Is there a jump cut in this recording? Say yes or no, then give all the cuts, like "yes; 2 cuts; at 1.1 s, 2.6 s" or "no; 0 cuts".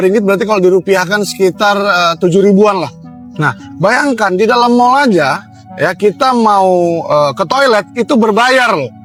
no; 0 cuts